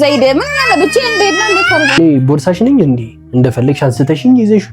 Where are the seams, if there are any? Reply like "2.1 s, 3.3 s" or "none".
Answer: 2.0 s